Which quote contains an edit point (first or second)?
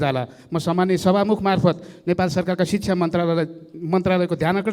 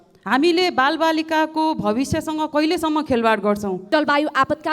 second